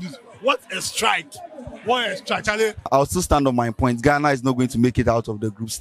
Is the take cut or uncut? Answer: cut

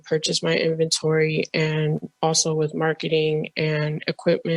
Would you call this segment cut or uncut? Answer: uncut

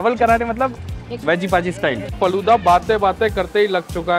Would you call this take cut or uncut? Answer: cut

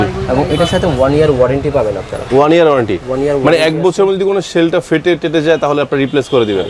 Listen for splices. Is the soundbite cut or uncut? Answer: uncut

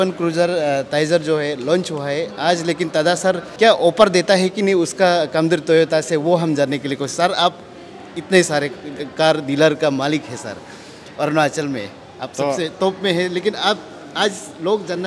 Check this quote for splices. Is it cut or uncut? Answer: cut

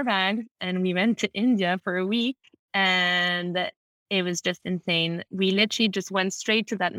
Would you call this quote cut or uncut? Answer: uncut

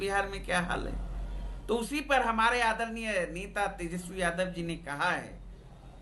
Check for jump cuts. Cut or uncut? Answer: uncut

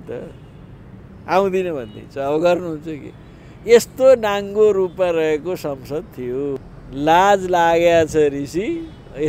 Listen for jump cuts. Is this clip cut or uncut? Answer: cut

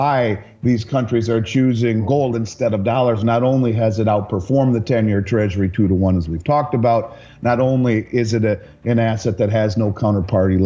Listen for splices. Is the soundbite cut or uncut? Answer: cut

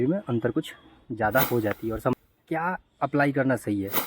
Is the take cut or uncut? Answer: cut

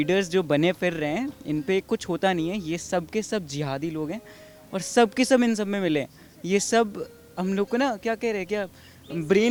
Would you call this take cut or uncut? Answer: uncut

